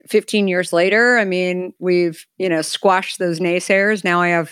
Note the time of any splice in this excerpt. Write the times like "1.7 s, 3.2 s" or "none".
2.2 s